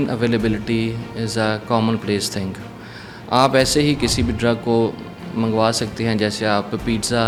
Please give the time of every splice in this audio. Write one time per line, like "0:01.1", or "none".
none